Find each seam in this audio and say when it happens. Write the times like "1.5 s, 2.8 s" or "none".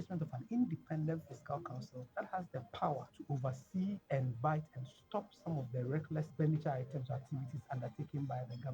2.0 s, 3.1 s, 4.0 s, 6.3 s